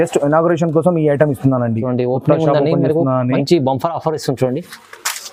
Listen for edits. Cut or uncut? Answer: uncut